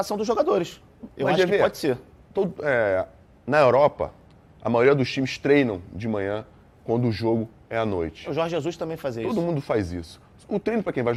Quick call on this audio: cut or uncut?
uncut